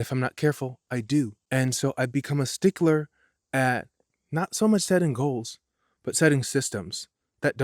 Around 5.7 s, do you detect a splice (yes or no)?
no